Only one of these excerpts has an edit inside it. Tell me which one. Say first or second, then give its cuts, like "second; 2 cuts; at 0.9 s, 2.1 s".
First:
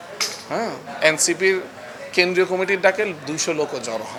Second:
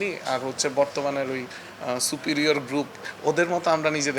second; 1 cut; at 3.0 s